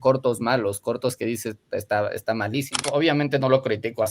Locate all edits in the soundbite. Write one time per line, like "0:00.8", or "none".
0:02.8